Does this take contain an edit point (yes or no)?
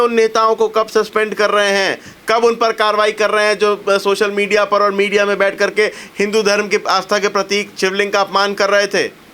no